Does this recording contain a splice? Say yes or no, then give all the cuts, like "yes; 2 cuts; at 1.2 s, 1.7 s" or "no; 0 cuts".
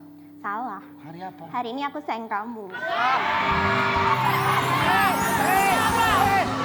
no; 0 cuts